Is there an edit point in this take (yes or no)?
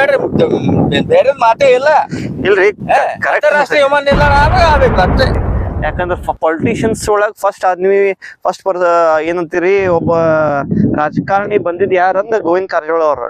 yes